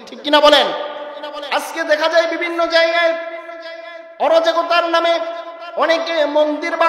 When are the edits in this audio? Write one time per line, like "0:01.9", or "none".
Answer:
0:01.3